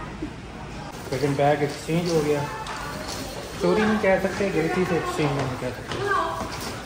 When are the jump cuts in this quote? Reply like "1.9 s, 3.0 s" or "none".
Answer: 0.9 s